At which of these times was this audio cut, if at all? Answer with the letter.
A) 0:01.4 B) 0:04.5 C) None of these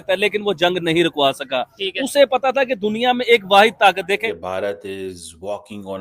B